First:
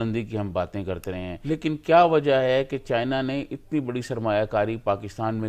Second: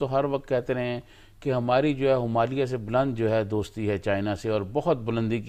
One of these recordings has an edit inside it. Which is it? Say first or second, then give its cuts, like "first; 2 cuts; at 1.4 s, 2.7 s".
first; 1 cut; at 1.3 s